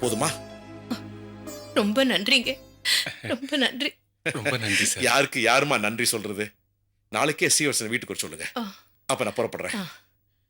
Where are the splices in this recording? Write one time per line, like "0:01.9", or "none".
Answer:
none